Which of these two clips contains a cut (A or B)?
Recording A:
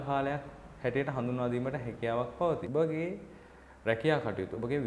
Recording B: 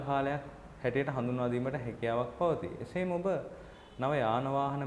A